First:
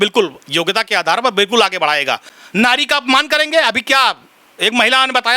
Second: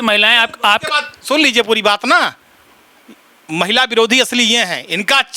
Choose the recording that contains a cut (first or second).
first